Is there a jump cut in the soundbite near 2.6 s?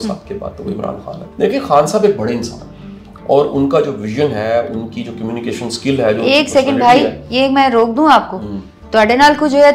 no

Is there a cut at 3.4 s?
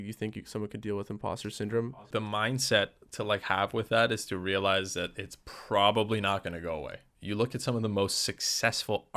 no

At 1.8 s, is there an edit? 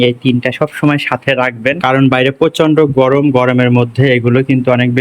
yes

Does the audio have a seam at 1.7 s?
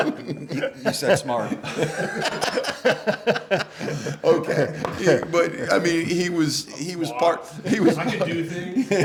no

